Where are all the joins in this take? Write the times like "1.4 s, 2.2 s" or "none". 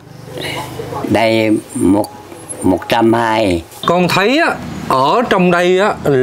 1.0 s, 3.8 s